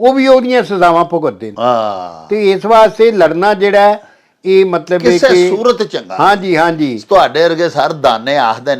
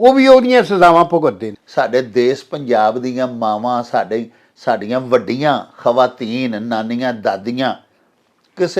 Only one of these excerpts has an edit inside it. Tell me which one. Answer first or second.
second